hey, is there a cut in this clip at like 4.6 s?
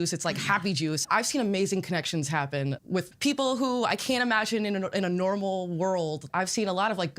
no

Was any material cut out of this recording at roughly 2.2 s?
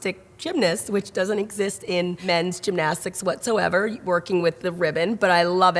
yes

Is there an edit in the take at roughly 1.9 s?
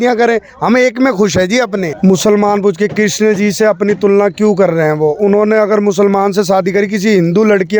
yes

